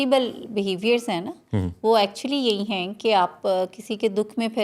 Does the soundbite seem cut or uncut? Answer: uncut